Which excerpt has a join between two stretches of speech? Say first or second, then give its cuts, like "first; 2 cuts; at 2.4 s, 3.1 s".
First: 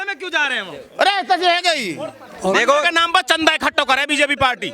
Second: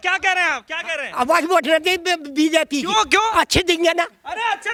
first; 1 cut; at 2.2 s